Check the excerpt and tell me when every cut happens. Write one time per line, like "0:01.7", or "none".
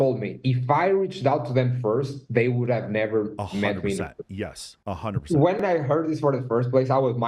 none